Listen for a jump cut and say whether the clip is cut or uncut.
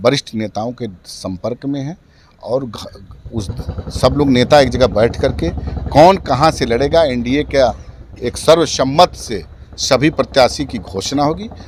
uncut